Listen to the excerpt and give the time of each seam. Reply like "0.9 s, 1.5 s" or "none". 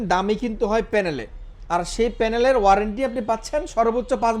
none